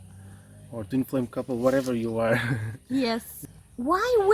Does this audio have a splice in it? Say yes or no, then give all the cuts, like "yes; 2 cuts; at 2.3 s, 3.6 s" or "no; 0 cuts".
yes; 1 cut; at 3.4 s